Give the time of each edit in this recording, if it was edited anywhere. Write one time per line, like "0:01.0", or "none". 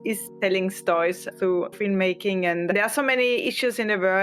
0:01.8
0:02.7